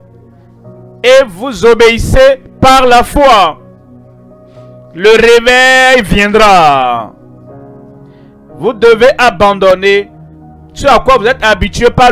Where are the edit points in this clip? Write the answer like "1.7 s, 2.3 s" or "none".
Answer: 3.6 s, 4.9 s